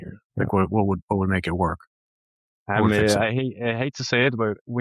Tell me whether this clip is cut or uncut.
uncut